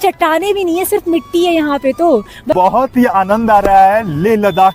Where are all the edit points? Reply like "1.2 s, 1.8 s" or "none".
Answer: 2.5 s